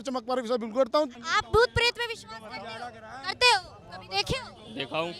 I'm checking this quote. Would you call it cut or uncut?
cut